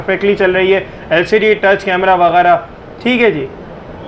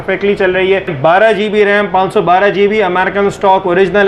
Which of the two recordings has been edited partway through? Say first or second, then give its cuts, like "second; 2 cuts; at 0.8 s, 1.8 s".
second; 1 cut; at 0.9 s